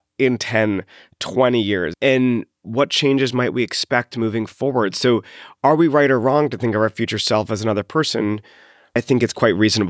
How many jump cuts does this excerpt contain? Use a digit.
2